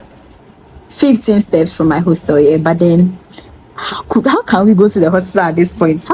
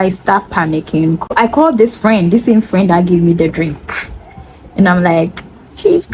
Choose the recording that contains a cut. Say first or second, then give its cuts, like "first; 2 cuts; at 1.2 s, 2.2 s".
second; 1 cut; at 1.3 s